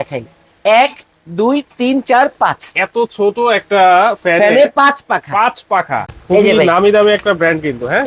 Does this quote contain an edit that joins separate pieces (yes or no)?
yes